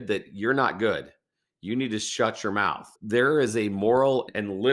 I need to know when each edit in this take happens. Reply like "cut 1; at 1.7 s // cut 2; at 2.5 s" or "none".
cut 1; at 2.9 s